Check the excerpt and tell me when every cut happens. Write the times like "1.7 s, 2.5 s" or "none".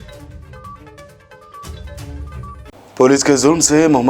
2.7 s